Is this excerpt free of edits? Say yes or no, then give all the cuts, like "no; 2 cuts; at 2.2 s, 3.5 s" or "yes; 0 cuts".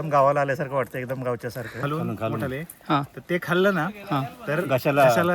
no; 1 cut; at 1.9 s